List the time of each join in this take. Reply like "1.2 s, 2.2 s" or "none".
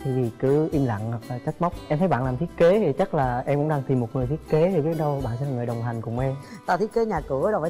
1.8 s